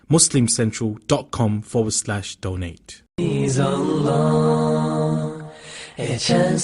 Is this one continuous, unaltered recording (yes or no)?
no